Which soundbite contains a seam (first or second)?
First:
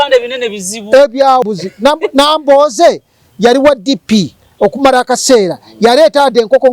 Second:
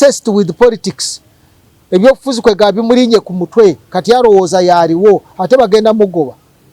first